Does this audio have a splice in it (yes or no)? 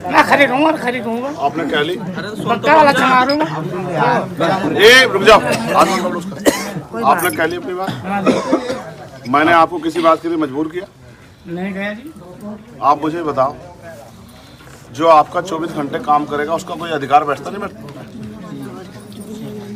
no